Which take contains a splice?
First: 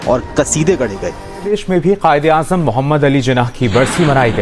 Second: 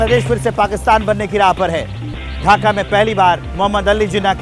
first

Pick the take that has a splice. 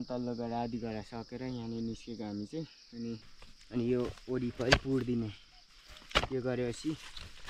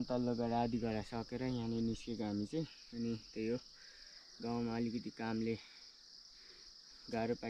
first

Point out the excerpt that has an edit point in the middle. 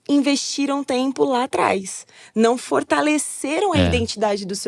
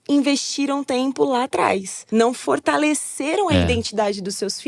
second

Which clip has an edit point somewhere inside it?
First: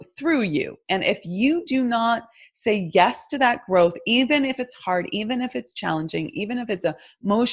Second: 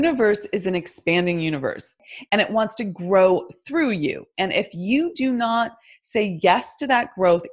second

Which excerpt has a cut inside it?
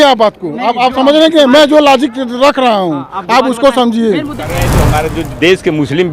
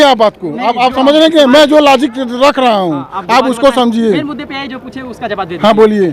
first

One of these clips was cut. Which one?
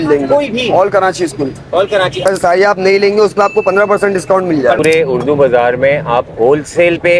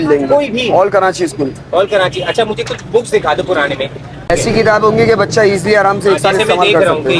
first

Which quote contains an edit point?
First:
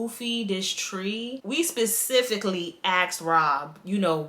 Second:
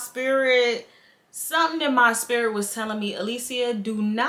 first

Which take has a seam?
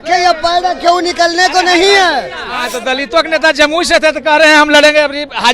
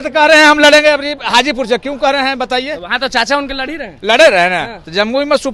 first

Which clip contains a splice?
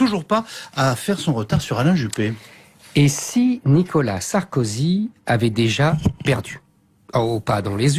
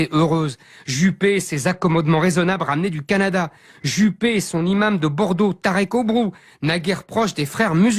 second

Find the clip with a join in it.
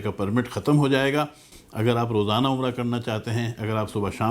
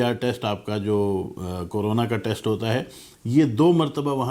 first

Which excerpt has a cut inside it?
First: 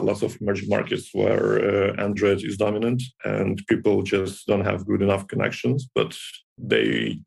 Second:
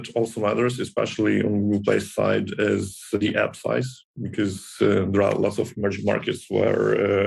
second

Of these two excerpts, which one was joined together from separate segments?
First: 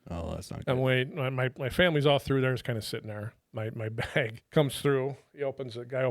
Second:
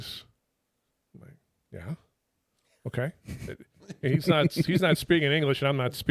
first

